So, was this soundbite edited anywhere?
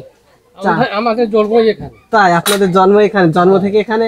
no; 0 cuts

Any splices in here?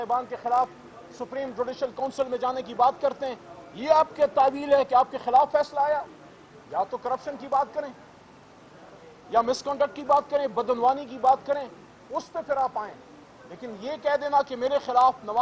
no; 0 cuts

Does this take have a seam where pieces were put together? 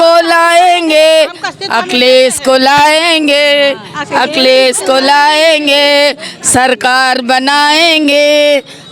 no; 0 cuts

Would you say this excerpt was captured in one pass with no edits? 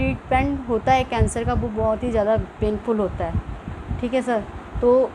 yes; 0 cuts

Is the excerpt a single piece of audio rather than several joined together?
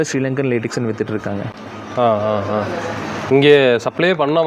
yes; 0 cuts

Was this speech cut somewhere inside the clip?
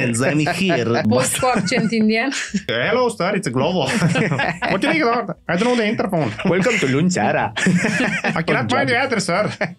yes; 2 cuts; at 1.0 s, 2.7 s

